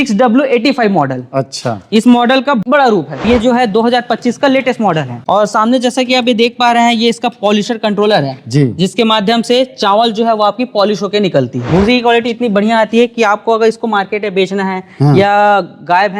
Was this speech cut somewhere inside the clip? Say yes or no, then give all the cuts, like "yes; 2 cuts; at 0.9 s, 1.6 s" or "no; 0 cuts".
yes; 3 cuts; at 3.2 s, 5.1 s, 11.7 s